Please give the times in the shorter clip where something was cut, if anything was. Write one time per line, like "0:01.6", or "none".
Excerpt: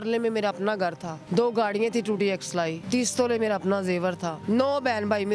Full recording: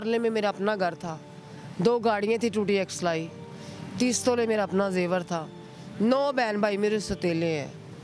0:01.1
0:02.8
0:04.3